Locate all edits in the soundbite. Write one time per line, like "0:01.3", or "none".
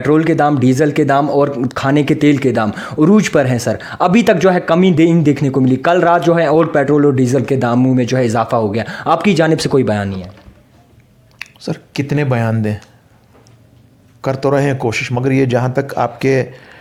none